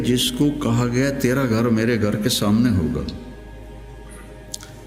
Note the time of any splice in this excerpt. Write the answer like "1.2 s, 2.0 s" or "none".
none